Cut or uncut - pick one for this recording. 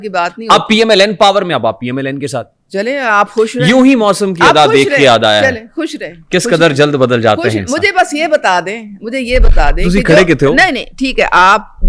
uncut